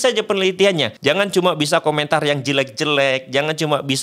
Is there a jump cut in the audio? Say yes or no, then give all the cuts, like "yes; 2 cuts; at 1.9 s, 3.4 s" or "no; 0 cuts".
yes; 1 cut; at 0.9 s